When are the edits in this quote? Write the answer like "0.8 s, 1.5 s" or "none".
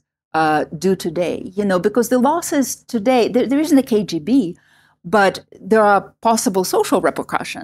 none